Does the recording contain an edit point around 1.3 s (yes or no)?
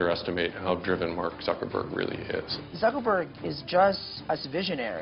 no